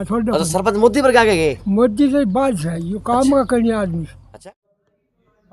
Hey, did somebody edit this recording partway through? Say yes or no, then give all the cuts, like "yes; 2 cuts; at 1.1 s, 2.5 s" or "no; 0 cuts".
yes; 1 cut; at 4.4 s